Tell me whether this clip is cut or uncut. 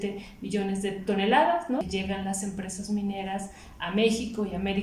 cut